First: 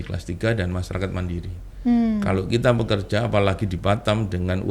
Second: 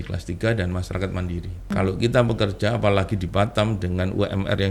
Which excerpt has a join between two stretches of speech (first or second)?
second